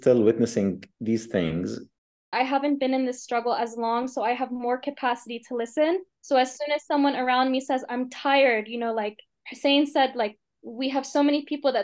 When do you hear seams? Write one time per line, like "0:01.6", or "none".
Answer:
0:02.1